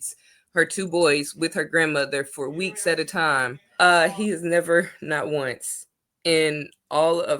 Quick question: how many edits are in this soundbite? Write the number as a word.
one